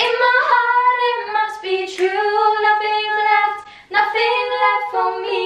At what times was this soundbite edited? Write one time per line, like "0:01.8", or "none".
none